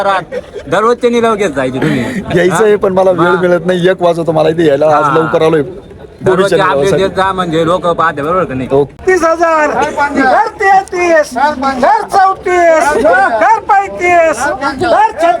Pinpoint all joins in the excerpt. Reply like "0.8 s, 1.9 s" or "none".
9.0 s